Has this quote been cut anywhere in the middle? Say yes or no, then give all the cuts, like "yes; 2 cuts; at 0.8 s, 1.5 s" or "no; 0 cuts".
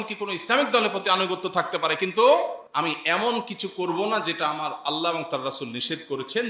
yes; 1 cut; at 2.6 s